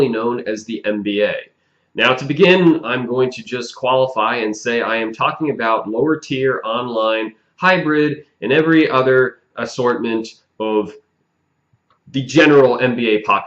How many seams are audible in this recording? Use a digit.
1